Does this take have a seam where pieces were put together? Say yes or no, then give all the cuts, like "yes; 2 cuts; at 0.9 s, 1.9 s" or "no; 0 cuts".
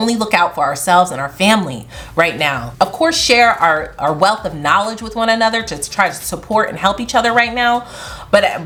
no; 0 cuts